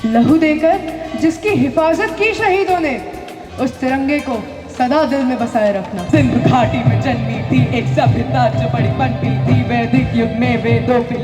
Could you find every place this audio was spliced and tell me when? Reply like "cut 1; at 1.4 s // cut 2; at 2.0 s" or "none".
cut 1; at 6.0 s